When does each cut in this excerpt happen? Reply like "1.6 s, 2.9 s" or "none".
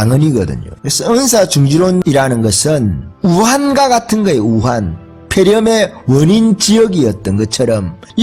none